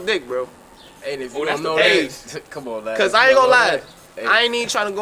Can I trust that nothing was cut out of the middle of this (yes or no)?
yes